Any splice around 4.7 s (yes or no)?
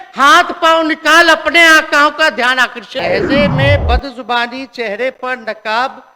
no